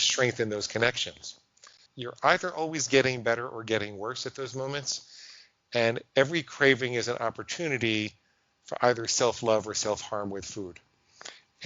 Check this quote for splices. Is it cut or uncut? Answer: cut